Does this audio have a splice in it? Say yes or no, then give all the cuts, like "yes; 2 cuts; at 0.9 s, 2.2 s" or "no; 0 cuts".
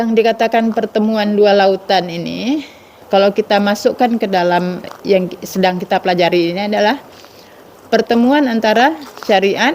yes; 2 cuts; at 3.0 s, 4.9 s